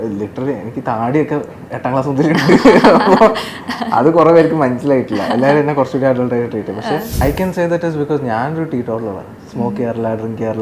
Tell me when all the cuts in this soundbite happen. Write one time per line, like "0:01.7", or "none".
0:07.2